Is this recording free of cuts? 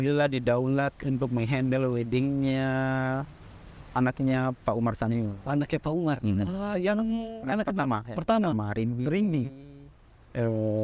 yes; 0 cuts

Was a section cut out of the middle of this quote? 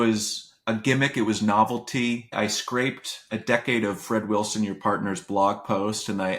yes; 1 cut; at 2.3 s

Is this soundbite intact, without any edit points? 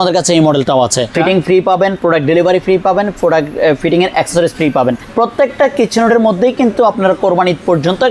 no; 2 cuts; at 1.1 s, 5.0 s

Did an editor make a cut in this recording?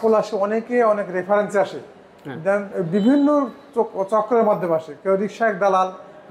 no; 0 cuts

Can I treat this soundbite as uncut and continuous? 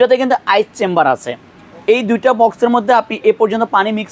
yes; 0 cuts

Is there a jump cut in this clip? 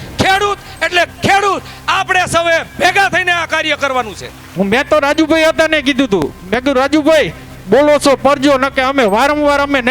yes; 1 cut; at 4.4 s

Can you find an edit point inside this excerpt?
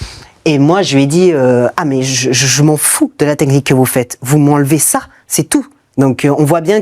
yes; 1 cut; at 5.8 s

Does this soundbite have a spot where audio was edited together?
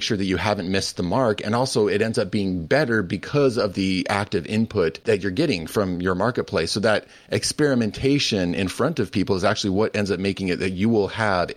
yes; 1 cut; at 5.0 s

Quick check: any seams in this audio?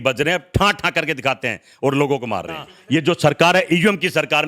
yes; 1 cut; at 2.7 s

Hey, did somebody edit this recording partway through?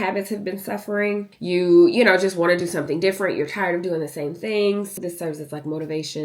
yes; 2 cuts; at 1.3 s, 5.0 s

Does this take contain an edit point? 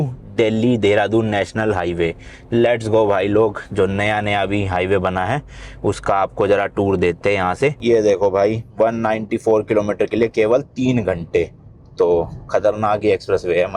yes; 1 cut; at 7.8 s

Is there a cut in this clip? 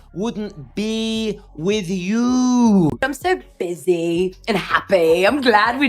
yes; 1 cut; at 3.0 s

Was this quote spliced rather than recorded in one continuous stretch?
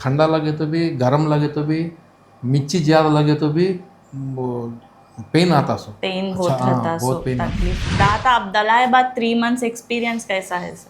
yes; 1 cut; at 7.7 s

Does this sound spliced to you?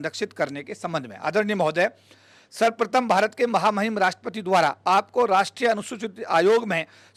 no; 0 cuts

